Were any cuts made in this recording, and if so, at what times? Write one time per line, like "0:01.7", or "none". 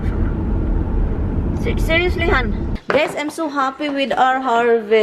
0:02.7